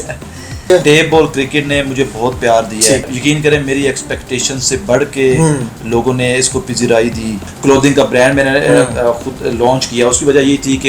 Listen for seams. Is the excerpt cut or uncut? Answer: cut